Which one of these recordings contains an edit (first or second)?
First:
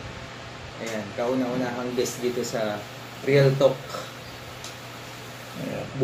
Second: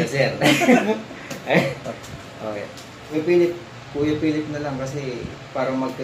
second